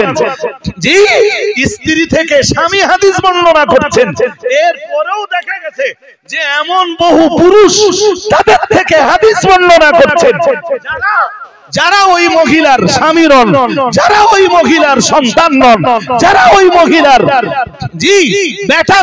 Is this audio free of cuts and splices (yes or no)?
yes